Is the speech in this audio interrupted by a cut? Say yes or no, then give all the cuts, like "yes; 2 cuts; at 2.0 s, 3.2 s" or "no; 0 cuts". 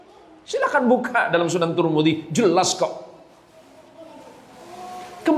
no; 0 cuts